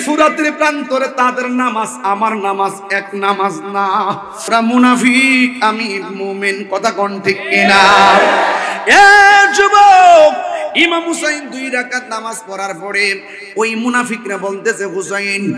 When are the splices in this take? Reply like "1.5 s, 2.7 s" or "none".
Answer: 4.5 s